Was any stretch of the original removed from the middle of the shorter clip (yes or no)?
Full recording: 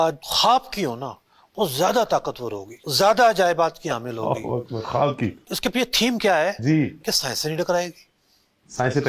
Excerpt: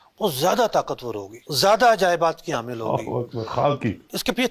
no